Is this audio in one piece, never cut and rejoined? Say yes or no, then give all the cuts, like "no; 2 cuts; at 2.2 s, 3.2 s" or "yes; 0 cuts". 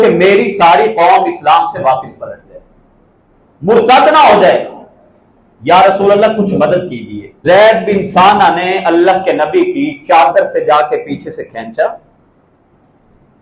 no; 1 cut; at 7.4 s